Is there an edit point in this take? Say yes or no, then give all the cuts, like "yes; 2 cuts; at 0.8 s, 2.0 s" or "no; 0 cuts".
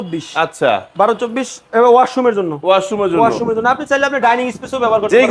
no; 0 cuts